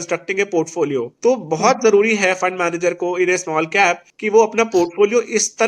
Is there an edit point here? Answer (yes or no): yes